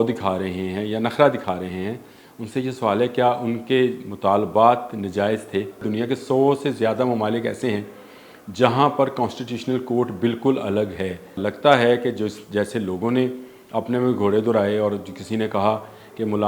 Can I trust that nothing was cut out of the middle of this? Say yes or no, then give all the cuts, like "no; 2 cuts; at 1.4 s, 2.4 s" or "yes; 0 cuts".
no; 2 cuts; at 5.8 s, 11.4 s